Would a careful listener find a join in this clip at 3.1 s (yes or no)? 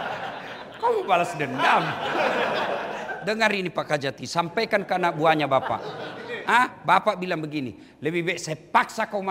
yes